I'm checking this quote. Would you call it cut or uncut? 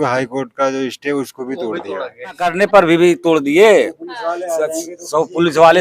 cut